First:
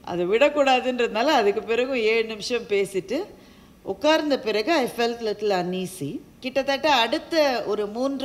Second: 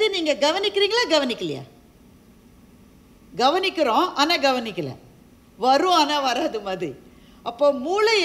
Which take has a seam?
first; 1 cut; at 6.3 s

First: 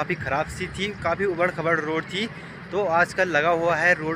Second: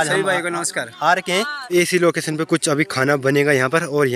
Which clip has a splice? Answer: second; 1 cut; at 1.6 s

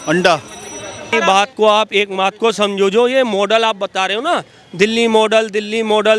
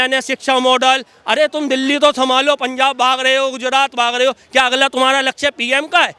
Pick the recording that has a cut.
first; 1 cut; at 1.1 s

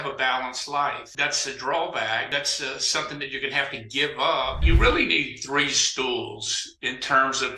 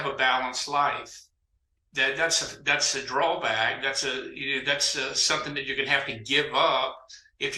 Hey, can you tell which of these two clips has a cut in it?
first; 3 cuts; at 1.1 s, 2.3 s, 4.6 s

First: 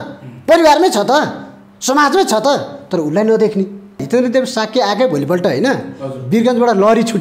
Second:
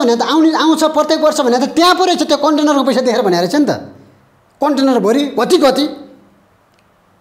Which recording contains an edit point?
first; 1 cut; at 4.0 s

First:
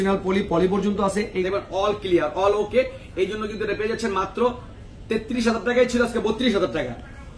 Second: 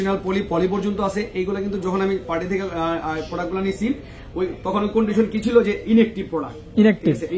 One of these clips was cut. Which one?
first; 1 cut; at 1.4 s

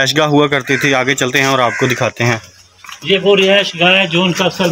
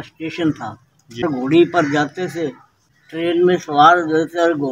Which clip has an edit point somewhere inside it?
second; 2 cuts; at 1.2 s, 2.7 s

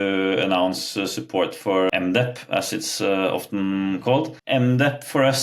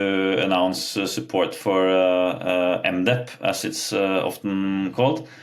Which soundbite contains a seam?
first; 2 cuts; at 1.9 s, 4.4 s

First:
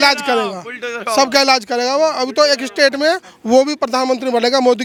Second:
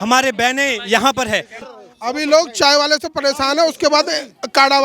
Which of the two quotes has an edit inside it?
second; 1 cut; at 1.7 s

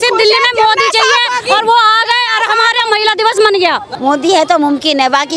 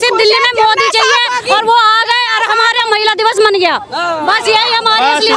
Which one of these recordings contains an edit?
first; 1 cut; at 3.9 s

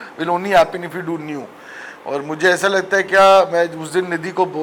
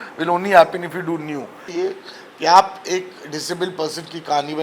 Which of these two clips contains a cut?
second; 1 cut; at 1.7 s

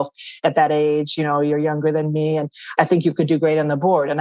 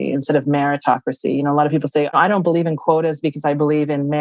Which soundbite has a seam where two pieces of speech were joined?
second; 1 cut; at 2.1 s

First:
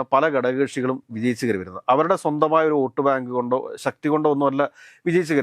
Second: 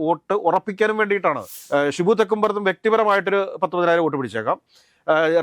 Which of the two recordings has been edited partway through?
second; 1 cut; at 1.5 s

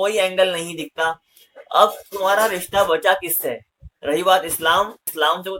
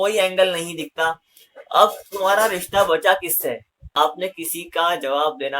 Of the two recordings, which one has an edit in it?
second; 1 cut; at 3.8 s

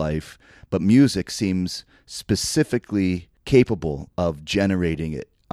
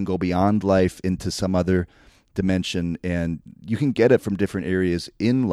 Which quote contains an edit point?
first; 1 cut; at 3.3 s

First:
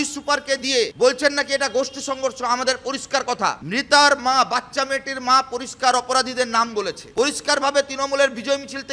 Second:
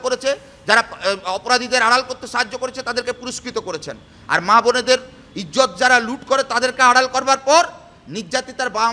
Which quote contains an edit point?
first; 3 cuts; at 0.9 s, 3.6 s, 7.0 s

